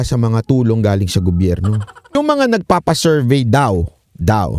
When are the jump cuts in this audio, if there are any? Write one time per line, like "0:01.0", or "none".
0:02.2